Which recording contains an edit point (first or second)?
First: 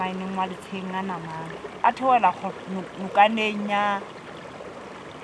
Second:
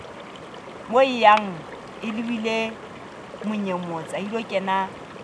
first